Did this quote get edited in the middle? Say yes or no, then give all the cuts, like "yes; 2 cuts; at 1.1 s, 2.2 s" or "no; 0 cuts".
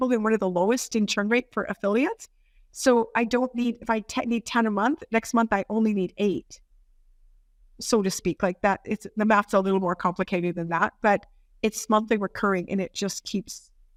no; 0 cuts